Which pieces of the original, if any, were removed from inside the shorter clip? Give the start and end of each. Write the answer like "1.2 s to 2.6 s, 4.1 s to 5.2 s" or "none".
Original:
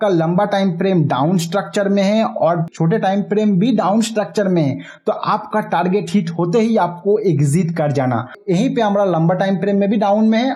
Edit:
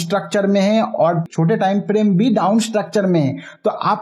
none

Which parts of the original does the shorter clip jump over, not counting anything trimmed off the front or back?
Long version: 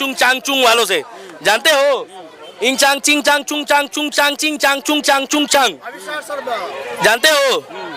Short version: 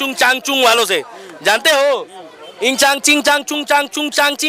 none

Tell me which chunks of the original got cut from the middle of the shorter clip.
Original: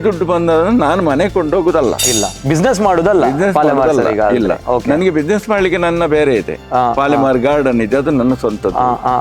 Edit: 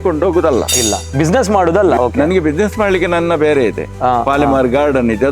3.3 s to 4.7 s

